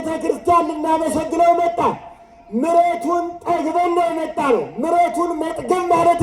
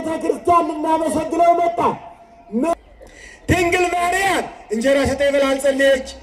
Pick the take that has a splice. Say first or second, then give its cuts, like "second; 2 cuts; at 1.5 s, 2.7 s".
second; 1 cut; at 2.7 s